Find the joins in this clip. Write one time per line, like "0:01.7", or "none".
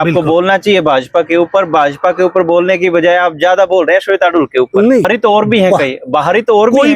0:05.1